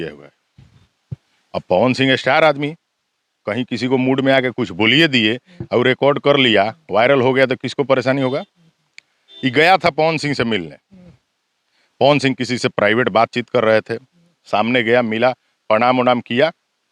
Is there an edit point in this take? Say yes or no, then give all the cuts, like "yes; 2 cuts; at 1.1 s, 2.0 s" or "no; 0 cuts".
no; 0 cuts